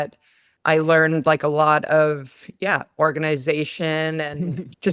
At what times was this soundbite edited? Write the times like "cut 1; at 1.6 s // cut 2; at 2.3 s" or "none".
none